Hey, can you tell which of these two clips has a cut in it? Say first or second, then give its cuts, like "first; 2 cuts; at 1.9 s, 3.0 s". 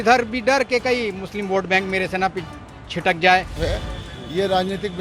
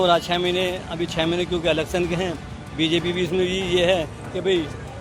first; 1 cut; at 3.6 s